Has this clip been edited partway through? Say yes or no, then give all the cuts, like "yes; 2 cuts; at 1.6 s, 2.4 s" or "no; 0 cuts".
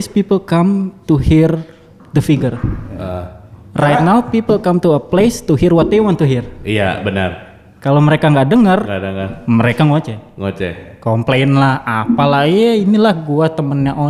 no; 0 cuts